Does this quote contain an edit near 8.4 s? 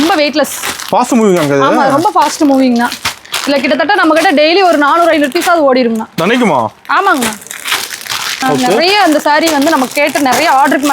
yes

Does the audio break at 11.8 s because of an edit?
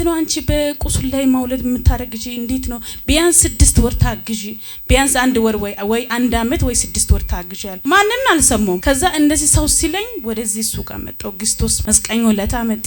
yes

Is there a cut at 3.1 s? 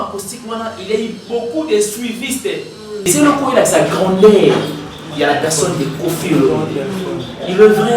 yes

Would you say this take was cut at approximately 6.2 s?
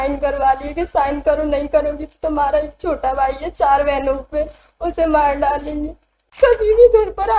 yes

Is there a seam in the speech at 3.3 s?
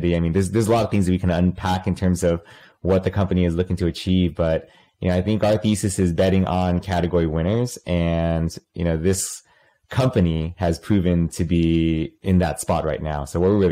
no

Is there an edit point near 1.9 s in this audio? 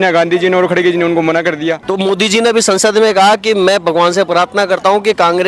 yes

